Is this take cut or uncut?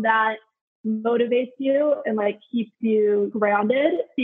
cut